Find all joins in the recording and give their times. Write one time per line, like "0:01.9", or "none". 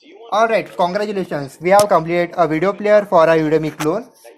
0:01.9